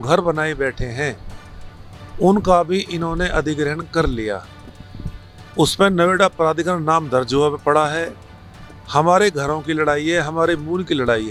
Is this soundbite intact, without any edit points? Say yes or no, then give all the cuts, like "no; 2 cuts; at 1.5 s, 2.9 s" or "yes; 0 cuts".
yes; 0 cuts